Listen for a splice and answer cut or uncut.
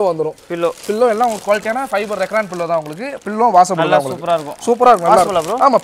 uncut